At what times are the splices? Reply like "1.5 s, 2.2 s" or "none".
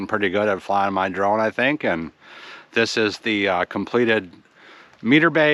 none